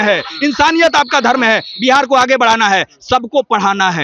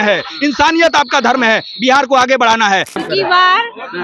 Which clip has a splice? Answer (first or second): second